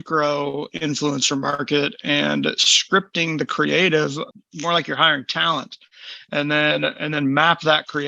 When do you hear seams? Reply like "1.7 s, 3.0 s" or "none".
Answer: 4.3 s

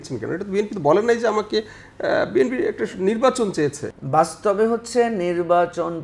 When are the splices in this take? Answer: 3.9 s

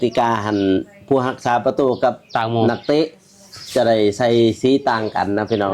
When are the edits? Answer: none

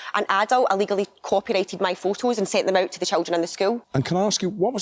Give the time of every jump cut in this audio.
3.8 s

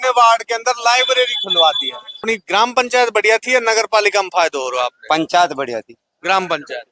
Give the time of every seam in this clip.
2.2 s

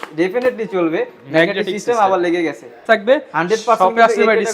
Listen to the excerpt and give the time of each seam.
2.8 s

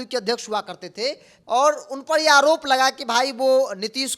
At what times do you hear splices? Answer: 1.3 s

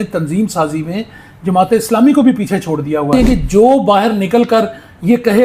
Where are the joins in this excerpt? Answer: 3.1 s

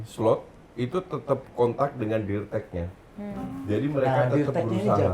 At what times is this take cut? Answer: none

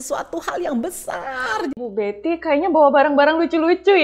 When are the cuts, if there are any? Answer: 1.7 s

